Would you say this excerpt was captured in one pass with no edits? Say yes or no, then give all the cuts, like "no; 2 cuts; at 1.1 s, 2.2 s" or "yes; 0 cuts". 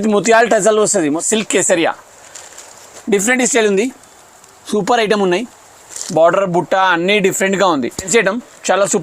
no; 2 cuts; at 1.2 s, 8.0 s